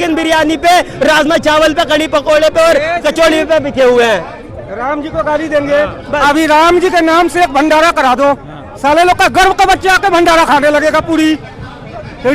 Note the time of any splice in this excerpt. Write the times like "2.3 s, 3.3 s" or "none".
none